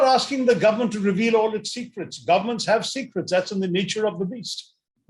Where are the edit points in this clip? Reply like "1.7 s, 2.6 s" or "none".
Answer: none